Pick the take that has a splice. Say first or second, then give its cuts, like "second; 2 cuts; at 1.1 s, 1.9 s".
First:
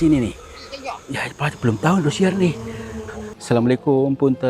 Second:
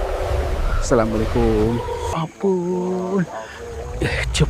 second; 1 cut; at 2.1 s